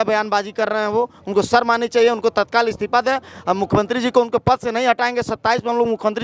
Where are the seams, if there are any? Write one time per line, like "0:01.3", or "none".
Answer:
none